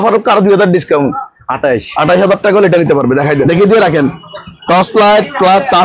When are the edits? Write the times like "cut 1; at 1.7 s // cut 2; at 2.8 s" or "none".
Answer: cut 1; at 3.4 s